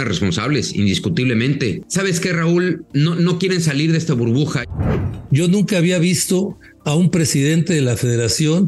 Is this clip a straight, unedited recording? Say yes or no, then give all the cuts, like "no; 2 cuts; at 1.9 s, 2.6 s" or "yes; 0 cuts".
no; 3 cuts; at 1.8 s, 2.8 s, 4.7 s